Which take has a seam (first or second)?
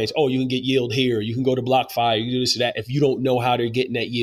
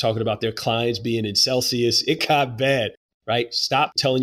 second